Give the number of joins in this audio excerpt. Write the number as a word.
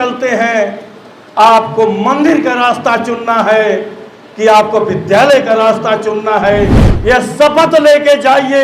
one